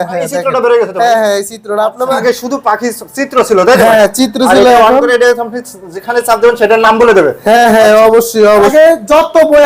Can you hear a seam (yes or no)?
yes